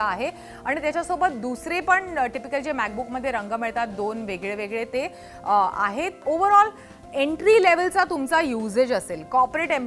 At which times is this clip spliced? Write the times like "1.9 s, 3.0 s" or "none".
6.2 s